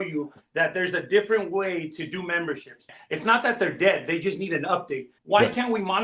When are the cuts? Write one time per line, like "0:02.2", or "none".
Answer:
0:03.0
0:05.1